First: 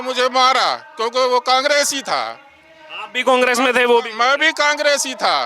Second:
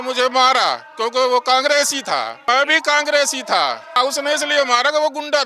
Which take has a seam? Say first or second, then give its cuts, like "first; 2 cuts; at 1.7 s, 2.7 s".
second; 2 cuts; at 2.4 s, 4.0 s